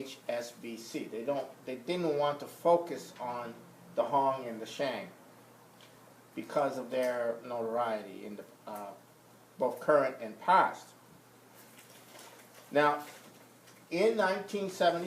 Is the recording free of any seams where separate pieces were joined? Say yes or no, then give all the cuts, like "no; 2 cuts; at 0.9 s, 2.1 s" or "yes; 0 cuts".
no; 1 cut; at 2.8 s